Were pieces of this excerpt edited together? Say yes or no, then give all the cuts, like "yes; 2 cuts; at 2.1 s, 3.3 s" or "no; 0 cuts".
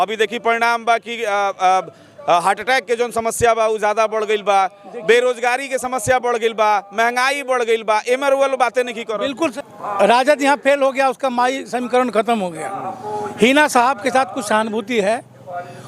yes; 1 cut; at 9.5 s